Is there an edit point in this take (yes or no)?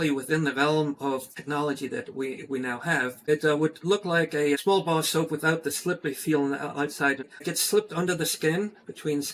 yes